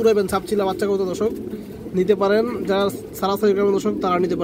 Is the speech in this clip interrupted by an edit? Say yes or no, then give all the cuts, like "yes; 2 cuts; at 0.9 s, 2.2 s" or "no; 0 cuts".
no; 0 cuts